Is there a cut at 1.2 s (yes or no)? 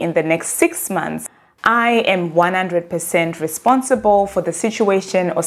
yes